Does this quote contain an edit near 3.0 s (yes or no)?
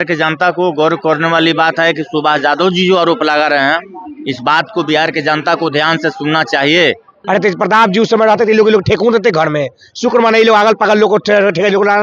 no